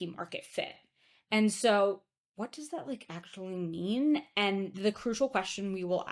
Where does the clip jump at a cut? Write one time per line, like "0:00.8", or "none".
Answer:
none